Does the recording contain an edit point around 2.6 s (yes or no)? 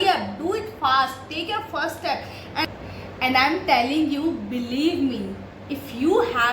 yes